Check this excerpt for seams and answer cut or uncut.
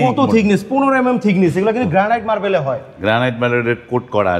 uncut